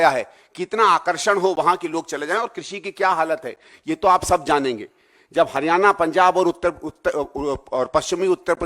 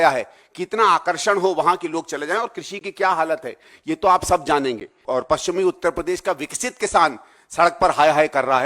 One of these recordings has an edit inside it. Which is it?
second; 1 cut; at 5.0 s

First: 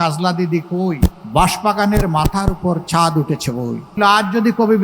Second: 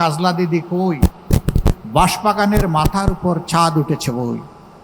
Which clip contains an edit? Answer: first; 2 cuts; at 1.2 s, 4.0 s

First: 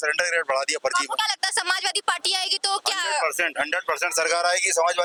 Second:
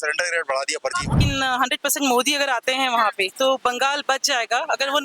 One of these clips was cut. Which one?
second; 1 cut; at 1.2 s

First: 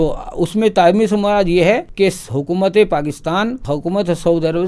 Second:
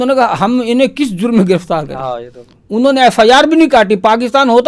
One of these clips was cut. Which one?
first; 2 cuts; at 1.9 s, 3.6 s

